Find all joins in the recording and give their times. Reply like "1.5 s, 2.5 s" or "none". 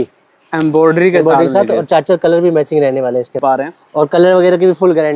3.4 s